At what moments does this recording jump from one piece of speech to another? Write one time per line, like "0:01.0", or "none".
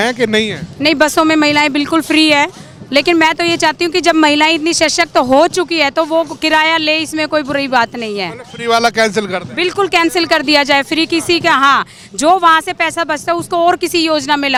none